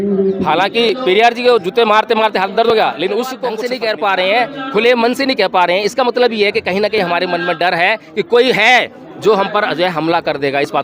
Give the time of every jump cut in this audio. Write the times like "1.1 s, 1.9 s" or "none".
3.6 s